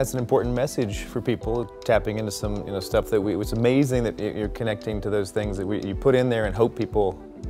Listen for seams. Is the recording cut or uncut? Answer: cut